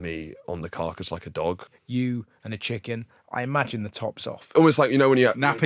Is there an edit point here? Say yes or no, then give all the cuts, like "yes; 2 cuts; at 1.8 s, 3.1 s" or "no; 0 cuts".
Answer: yes; 2 cuts; at 1.7 s, 4.5 s